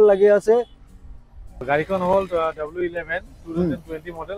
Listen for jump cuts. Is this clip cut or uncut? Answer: cut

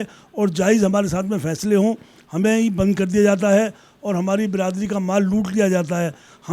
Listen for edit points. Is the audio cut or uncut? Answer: uncut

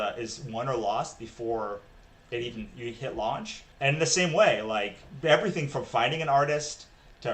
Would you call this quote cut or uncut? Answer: cut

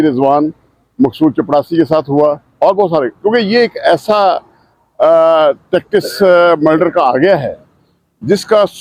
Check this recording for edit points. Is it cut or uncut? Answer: uncut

